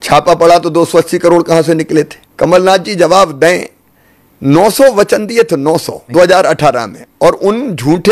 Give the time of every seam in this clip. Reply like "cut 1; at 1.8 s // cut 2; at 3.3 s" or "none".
cut 1; at 2.2 s // cut 2; at 6.0 s